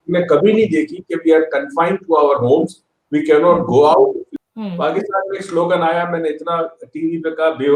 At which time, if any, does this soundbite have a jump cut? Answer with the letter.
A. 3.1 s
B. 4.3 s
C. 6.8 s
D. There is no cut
B